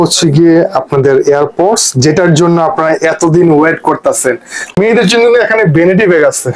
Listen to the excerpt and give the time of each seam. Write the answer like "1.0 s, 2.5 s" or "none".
4.8 s